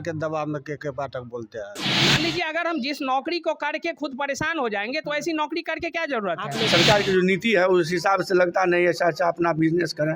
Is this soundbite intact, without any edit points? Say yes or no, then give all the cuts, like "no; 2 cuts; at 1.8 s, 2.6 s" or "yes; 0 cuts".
no; 2 cuts; at 1.9 s, 6.7 s